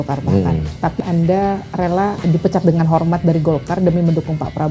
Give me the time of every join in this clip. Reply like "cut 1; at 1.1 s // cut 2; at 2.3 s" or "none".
cut 1; at 1.0 s // cut 2; at 2.2 s